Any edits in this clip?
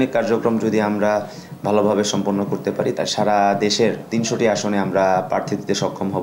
yes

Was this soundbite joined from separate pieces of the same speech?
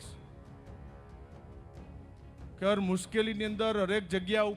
no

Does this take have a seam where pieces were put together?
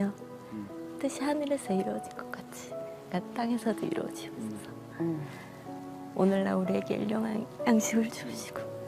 no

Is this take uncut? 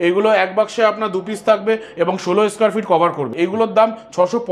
no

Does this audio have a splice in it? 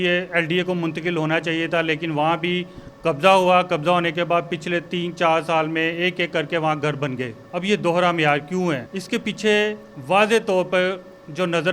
yes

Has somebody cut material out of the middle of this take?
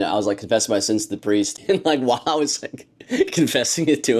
yes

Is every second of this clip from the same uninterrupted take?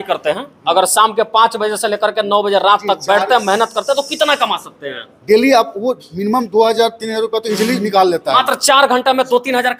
yes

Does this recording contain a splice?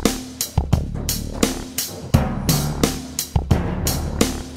yes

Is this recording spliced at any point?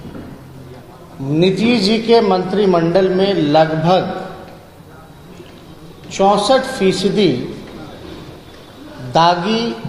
no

